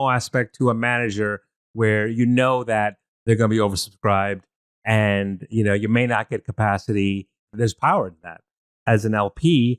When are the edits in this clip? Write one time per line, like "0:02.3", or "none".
none